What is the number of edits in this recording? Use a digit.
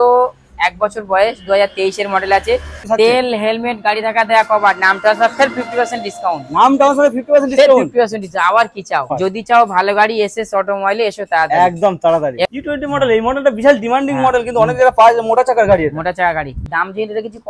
4